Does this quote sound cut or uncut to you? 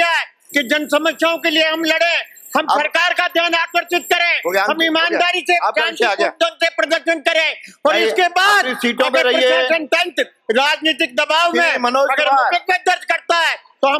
uncut